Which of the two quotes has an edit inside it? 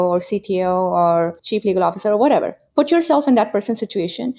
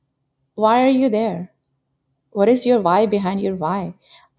first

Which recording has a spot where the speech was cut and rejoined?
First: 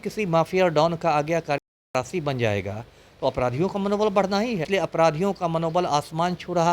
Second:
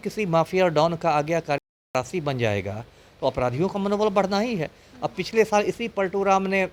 first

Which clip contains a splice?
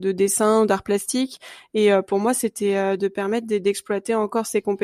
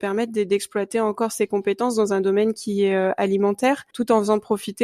second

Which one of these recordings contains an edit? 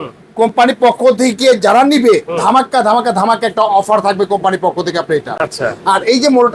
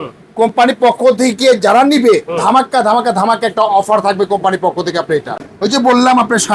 second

